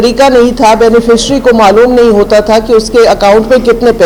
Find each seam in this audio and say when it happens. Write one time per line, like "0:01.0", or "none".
none